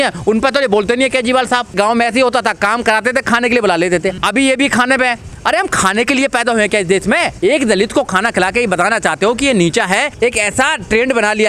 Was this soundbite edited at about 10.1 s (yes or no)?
yes